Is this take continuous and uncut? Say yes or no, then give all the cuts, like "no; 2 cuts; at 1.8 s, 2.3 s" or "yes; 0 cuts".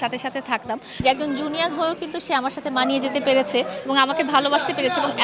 no; 1 cut; at 1.0 s